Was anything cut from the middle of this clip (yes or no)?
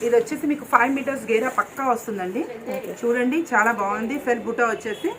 no